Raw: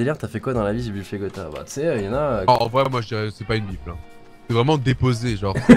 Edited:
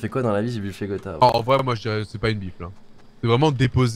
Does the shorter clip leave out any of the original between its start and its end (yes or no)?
yes